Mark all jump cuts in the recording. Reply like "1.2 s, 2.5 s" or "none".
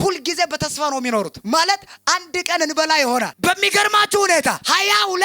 3.3 s